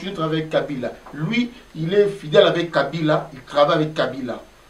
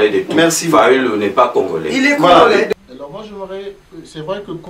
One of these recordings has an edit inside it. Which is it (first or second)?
second